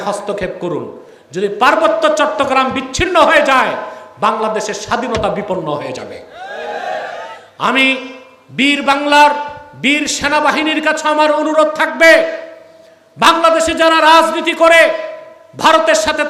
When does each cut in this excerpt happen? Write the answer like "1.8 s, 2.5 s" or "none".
none